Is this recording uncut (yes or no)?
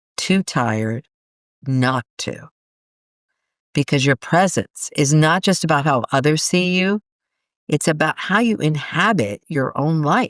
yes